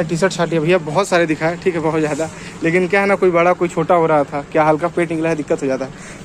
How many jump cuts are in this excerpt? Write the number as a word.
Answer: zero